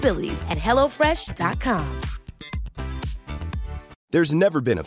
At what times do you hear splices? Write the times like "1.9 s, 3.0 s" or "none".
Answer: 3.9 s